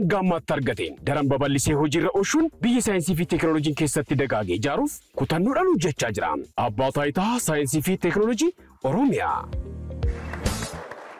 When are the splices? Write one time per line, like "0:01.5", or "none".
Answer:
0:10.3

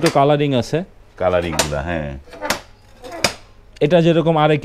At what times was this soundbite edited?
none

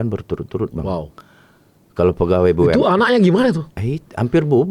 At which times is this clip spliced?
none

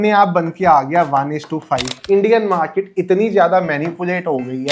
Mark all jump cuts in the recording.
0:01.9

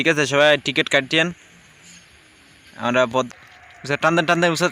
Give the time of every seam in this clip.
0:03.3

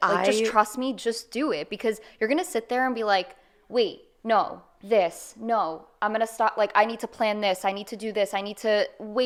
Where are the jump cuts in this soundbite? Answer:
none

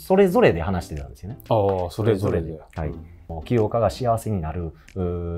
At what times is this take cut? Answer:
none

